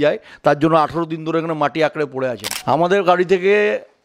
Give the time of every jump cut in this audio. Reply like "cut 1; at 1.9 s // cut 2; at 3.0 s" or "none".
cut 1; at 2.5 s